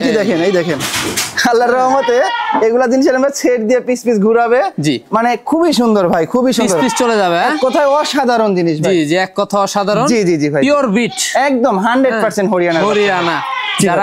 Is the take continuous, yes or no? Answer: yes